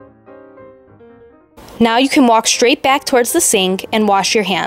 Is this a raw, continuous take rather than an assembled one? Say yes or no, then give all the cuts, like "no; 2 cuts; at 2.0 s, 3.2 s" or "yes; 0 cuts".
no; 1 cut; at 1.5 s